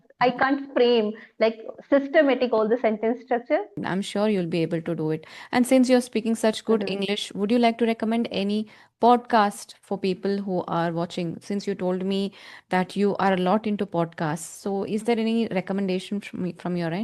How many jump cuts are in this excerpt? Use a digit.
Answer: 1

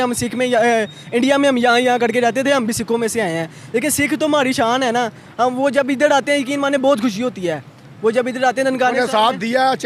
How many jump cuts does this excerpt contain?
0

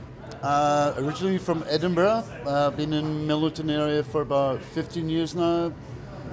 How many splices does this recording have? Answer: 1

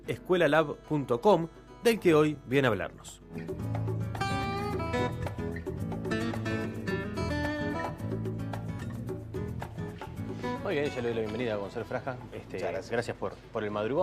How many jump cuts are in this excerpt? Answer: 0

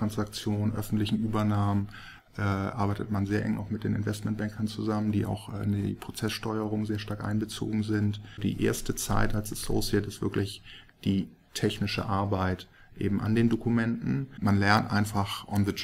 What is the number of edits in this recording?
2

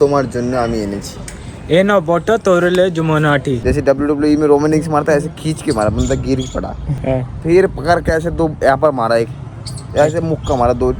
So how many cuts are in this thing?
2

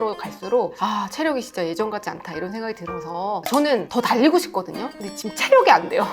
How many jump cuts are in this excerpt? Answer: 1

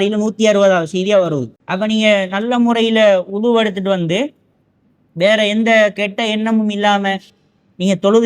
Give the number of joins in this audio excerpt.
1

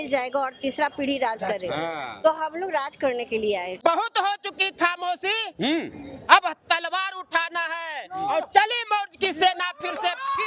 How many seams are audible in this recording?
1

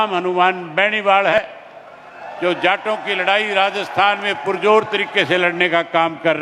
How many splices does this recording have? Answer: 1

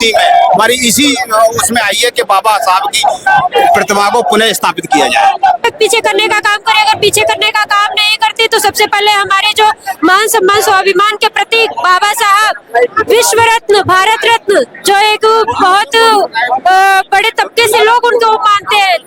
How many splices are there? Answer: 1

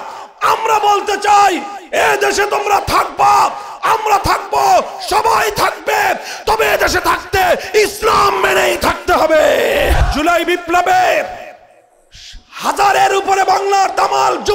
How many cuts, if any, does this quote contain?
1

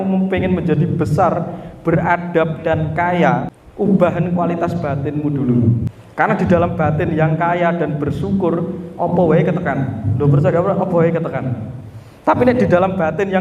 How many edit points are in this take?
2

